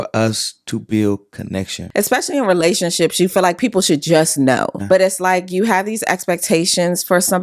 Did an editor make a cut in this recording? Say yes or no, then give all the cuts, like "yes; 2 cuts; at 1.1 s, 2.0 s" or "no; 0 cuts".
yes; 2 cuts; at 1.8 s, 4.8 s